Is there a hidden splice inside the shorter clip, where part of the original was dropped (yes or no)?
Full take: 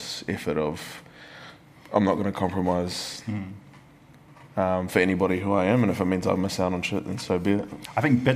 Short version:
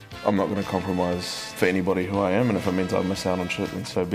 yes